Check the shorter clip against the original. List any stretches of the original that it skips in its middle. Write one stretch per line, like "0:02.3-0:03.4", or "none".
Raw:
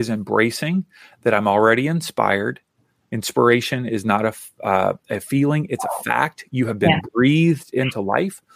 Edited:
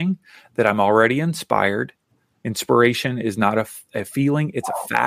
0:04.5-0:05.0